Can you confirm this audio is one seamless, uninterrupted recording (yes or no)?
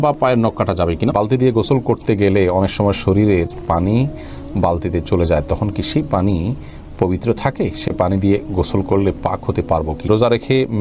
no